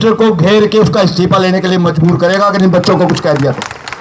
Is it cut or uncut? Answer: uncut